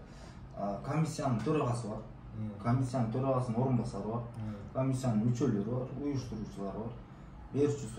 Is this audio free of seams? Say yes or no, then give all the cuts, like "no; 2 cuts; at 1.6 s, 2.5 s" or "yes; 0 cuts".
yes; 0 cuts